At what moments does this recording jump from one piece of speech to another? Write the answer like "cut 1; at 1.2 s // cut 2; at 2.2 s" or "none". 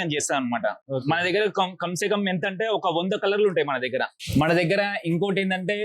cut 1; at 0.8 s // cut 2; at 4.2 s